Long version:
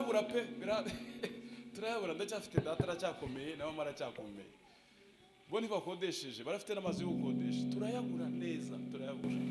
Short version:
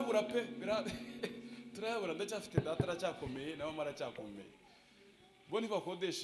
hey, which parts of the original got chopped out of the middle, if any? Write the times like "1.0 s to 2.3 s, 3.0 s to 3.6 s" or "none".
none